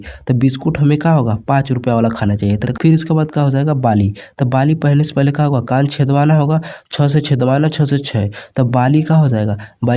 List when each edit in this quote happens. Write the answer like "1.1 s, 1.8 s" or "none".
2.6 s